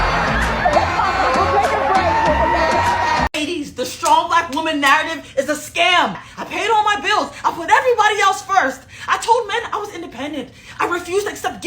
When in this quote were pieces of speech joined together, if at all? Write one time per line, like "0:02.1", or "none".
0:03.4
0:06.3